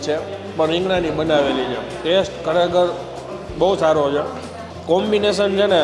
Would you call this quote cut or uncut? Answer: uncut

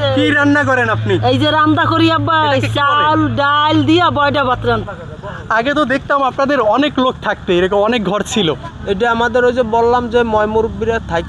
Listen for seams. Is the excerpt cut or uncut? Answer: cut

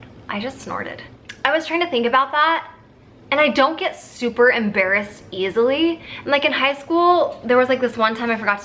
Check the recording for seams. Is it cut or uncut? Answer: uncut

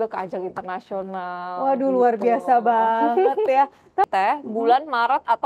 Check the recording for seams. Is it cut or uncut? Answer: cut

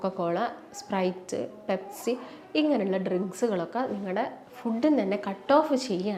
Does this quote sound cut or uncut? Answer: uncut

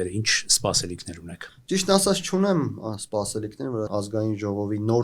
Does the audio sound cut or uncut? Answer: cut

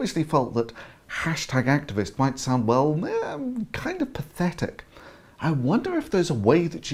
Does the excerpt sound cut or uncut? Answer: uncut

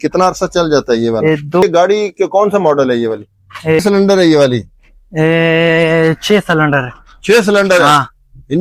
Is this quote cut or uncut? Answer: cut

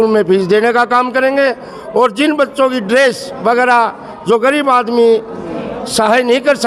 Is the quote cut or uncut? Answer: uncut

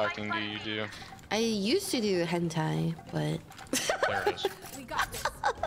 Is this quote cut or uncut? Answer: uncut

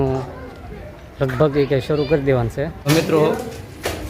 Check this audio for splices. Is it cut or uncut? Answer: cut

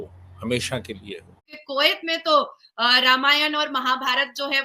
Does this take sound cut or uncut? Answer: cut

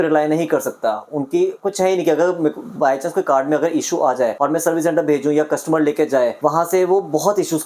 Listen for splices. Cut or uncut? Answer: uncut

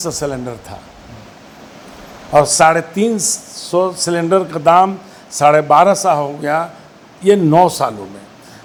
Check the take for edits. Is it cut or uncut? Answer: uncut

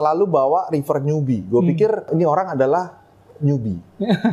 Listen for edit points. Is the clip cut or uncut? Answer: cut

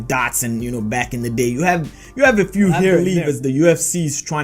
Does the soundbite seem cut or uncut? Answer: cut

